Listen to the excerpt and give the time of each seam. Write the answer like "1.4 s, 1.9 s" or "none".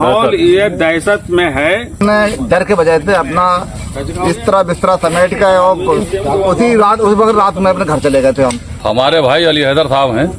2.0 s, 8.7 s